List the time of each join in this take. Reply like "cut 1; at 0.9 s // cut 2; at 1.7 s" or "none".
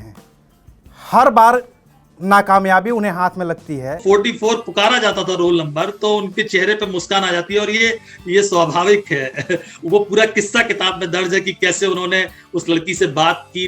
cut 1; at 4.0 s